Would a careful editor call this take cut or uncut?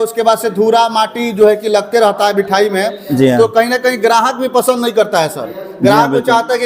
uncut